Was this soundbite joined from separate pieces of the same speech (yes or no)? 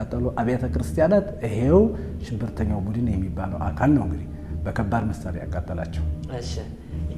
no